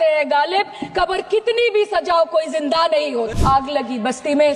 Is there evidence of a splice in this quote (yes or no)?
yes